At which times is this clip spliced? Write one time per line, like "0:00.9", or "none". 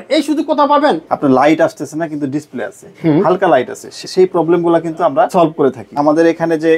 0:01.1
0:04.0
0:05.5